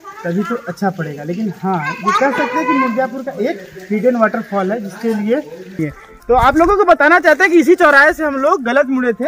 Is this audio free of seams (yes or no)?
no